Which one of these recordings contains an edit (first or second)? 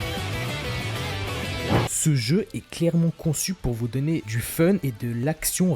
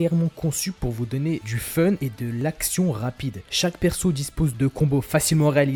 first